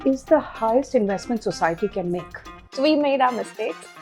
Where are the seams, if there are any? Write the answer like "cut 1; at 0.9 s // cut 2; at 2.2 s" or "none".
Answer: cut 1; at 2.6 s